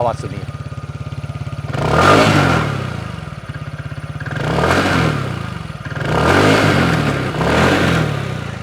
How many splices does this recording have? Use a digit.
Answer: 0